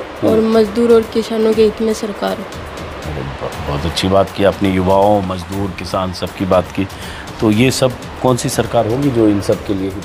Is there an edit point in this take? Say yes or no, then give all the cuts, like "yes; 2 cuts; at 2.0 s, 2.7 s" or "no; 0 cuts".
no; 0 cuts